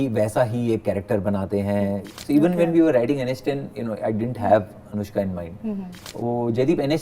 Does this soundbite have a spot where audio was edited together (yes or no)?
yes